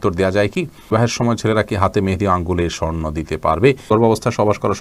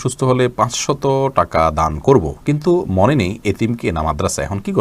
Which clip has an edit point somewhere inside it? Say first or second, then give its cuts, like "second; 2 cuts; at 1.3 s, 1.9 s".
first; 2 cuts; at 0.9 s, 3.9 s